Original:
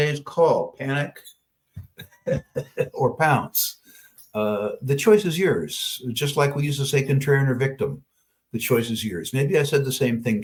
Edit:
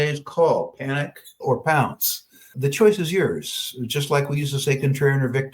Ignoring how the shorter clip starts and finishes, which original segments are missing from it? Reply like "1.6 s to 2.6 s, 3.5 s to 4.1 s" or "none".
1.4 s to 2.9 s, 4.1 s to 4.8 s